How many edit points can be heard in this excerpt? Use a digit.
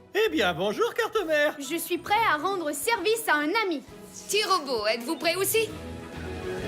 1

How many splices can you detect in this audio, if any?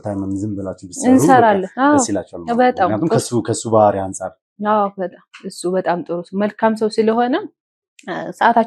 0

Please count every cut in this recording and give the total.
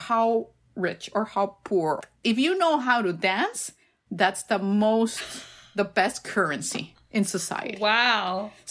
1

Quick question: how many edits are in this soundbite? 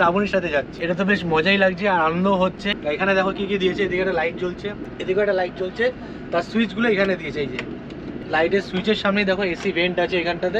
0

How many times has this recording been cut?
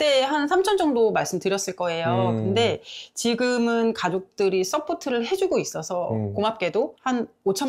0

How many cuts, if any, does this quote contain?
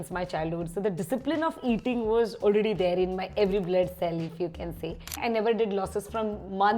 1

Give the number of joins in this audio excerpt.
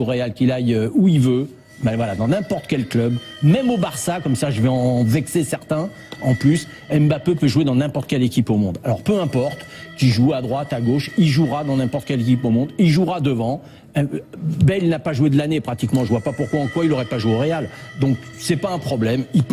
1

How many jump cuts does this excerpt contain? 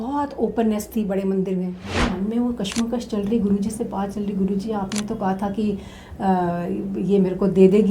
1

